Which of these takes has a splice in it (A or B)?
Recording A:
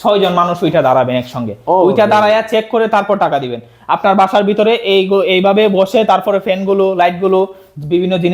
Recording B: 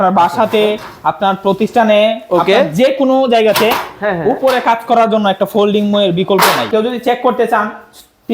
B